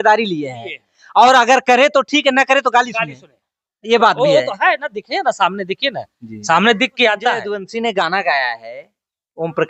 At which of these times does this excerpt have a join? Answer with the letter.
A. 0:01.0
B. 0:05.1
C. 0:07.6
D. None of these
C